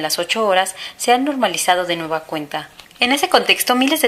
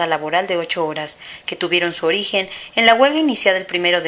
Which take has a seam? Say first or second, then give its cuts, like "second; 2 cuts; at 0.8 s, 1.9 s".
first; 1 cut; at 2.1 s